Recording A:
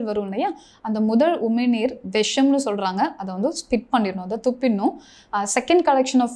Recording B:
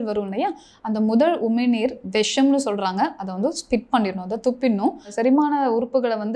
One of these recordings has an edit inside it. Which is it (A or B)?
B